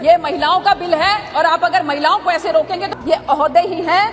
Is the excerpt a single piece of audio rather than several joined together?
no; 1 cut; at 2.9 s

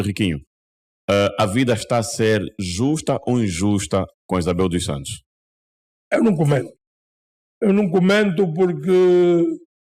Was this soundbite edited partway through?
no; 0 cuts

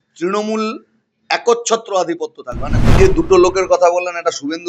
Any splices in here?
yes; 1 cut; at 3.0 s

